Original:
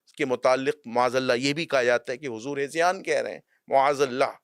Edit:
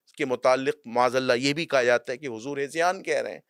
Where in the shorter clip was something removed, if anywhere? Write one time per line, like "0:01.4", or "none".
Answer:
none